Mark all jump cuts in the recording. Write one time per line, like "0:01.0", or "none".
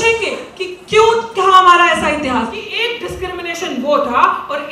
0:02.6